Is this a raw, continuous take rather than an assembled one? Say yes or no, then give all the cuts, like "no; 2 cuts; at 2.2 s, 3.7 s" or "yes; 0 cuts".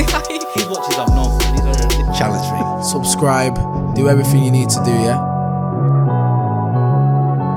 yes; 0 cuts